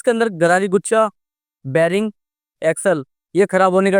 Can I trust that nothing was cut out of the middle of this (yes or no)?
yes